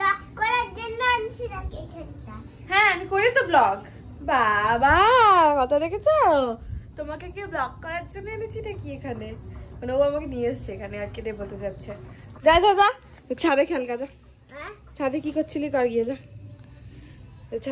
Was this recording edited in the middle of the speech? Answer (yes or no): no